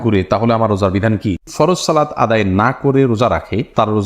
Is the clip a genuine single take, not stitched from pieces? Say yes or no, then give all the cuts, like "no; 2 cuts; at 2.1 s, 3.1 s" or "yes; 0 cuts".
no; 1 cut; at 1.5 s